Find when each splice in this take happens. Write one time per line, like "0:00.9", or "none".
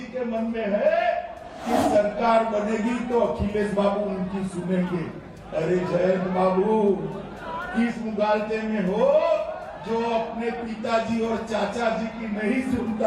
0:09.5